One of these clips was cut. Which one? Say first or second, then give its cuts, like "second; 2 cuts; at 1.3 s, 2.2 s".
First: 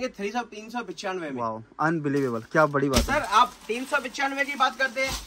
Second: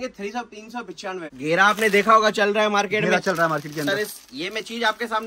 second; 1 cut; at 1.3 s